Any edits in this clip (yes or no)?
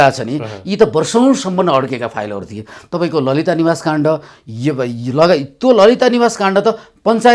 no